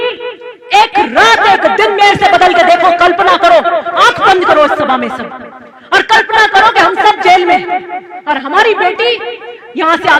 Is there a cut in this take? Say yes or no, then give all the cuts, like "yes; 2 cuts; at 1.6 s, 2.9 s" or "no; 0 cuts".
no; 0 cuts